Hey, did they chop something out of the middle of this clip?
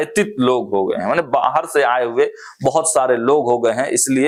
no; 0 cuts

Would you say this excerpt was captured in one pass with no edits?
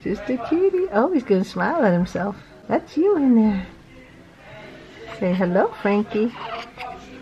yes; 0 cuts

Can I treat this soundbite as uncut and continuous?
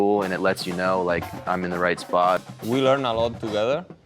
no; 1 cut; at 2.4 s

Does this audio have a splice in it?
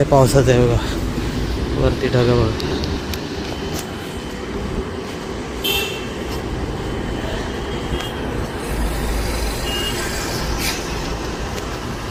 no; 0 cuts

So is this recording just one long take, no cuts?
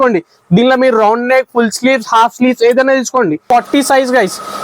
no; 1 cut; at 3.4 s

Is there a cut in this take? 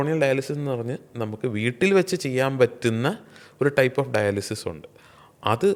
no; 0 cuts

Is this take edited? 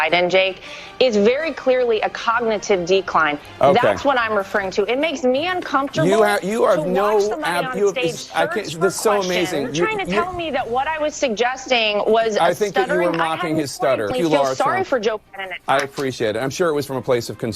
yes; 1 cut; at 14.1 s

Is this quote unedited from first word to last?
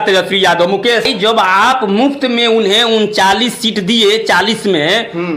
no; 1 cut; at 1.1 s

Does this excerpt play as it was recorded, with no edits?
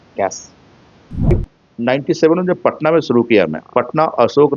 no; 1 cut; at 1.3 s

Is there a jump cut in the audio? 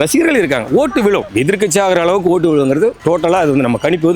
yes; 2 cuts; at 1.3 s, 3.0 s

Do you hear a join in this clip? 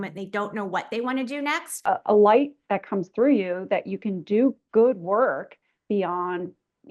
yes; 1 cut; at 1.8 s

